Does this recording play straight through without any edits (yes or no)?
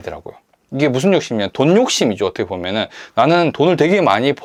yes